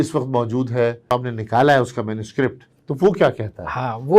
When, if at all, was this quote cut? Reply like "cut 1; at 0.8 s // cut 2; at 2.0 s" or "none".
cut 1; at 1.1 s